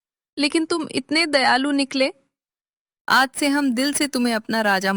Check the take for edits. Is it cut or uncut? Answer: uncut